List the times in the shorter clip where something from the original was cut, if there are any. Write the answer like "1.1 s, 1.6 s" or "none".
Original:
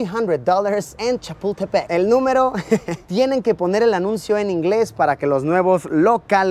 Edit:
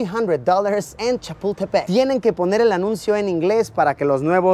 1.9 s